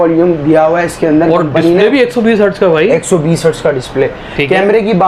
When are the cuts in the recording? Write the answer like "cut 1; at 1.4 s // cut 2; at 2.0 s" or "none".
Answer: none